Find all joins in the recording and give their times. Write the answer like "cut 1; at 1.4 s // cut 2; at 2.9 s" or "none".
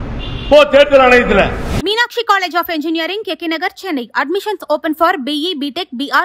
cut 1; at 1.7 s